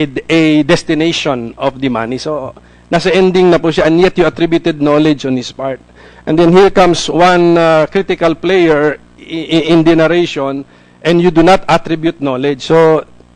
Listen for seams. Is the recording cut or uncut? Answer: uncut